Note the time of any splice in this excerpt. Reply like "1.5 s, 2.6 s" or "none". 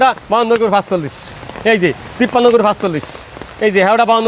none

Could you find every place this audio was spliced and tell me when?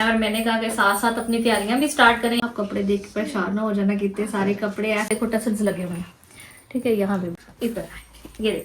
2.4 s, 5.1 s, 7.4 s

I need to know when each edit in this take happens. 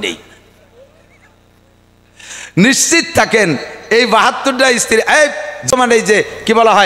5.7 s

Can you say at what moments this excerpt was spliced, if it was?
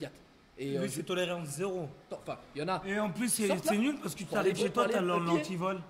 2.1 s

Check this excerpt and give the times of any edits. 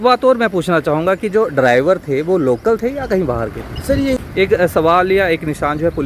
4.2 s

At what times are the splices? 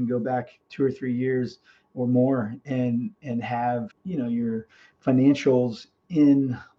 3.9 s

